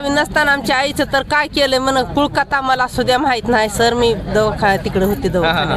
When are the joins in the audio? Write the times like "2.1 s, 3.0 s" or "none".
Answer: none

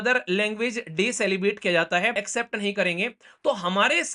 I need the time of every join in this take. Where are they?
2.2 s

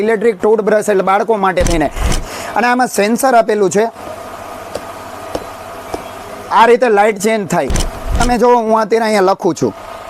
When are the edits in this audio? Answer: 2.2 s, 8.2 s

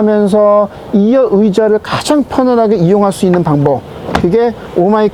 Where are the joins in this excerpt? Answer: none

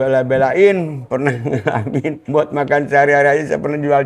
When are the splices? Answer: none

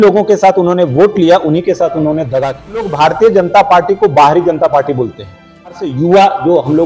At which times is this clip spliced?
2.9 s, 5.7 s

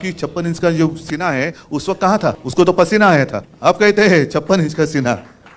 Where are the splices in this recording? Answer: 2.4 s, 3.4 s

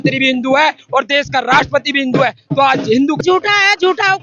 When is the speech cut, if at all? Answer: 3.2 s

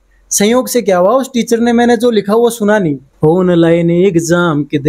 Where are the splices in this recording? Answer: 3.1 s

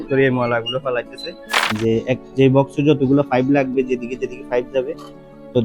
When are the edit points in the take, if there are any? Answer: 1.7 s

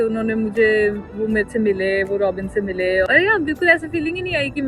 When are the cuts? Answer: none

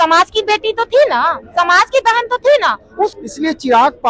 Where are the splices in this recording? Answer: 3.2 s

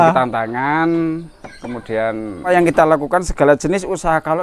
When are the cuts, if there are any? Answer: 2.5 s

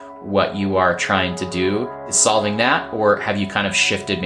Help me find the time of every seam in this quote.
2.0 s

